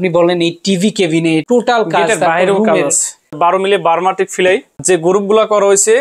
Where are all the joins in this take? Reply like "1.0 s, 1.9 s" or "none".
1.4 s, 3.4 s, 4.8 s